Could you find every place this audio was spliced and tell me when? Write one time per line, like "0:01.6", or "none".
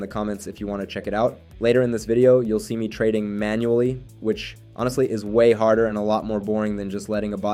none